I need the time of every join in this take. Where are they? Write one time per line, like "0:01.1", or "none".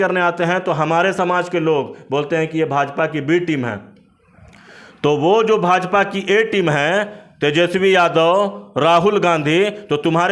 none